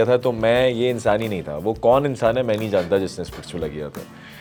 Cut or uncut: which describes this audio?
uncut